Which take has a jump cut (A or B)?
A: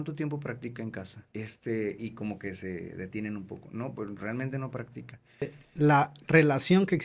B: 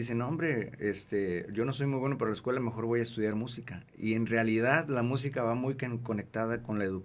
A